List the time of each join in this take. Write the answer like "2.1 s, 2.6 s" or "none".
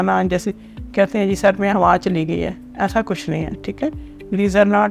none

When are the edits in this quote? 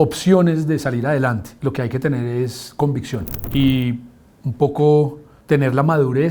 1.5 s, 3.4 s, 5.3 s

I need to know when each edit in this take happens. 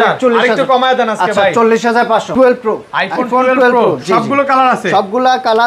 2.3 s

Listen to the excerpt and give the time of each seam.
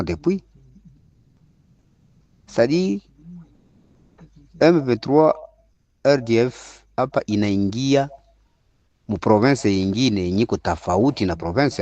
none

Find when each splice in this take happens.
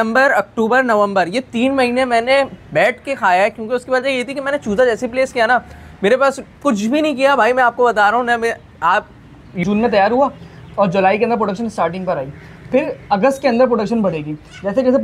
9.6 s

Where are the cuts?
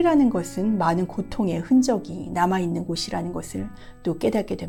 none

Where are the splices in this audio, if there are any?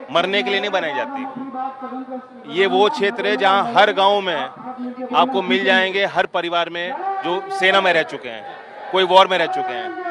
none

